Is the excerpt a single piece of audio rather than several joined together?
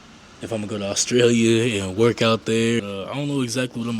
no; 1 cut; at 2.8 s

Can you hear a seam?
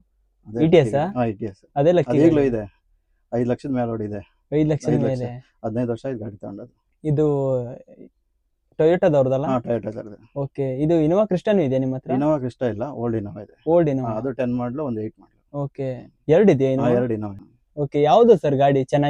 no; 0 cuts

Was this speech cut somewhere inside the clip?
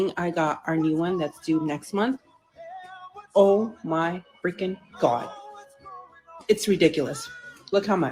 no; 0 cuts

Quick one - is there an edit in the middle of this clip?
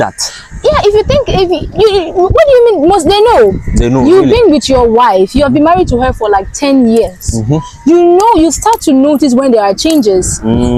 no; 0 cuts

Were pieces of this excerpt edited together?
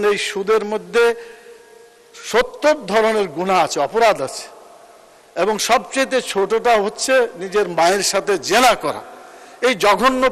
no; 0 cuts

